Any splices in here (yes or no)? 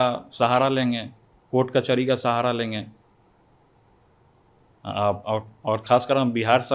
no